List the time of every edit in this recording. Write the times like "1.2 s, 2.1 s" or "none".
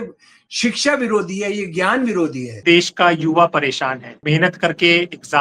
2.6 s, 4.2 s